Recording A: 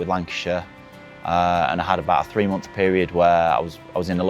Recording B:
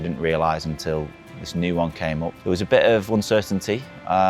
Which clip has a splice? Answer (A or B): B